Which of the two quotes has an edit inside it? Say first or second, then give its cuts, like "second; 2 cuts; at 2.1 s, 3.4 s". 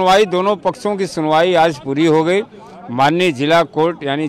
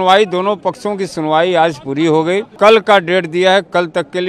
second; 1 cut; at 2.5 s